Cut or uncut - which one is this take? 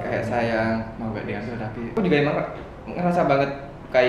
cut